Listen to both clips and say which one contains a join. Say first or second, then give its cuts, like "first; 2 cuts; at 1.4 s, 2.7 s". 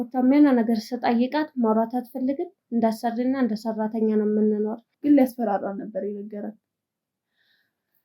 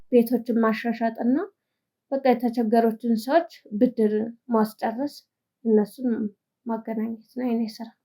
first; 1 cut; at 4.9 s